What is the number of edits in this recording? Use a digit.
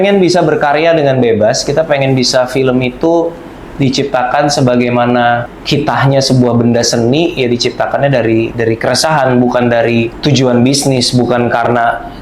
2